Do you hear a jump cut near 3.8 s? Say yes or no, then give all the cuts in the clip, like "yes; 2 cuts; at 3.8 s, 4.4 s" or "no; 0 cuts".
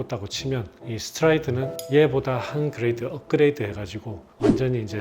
no; 1 cut; at 1.7 s